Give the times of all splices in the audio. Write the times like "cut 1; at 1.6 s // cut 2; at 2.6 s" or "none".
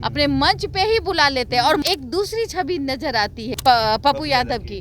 cut 1; at 1.8 s // cut 2; at 3.5 s